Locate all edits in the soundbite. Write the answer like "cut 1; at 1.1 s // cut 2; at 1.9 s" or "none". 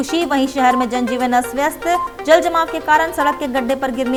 none